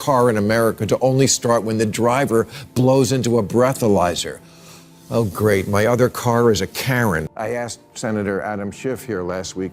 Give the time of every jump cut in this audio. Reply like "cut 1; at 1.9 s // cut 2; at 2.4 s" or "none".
cut 1; at 7.2 s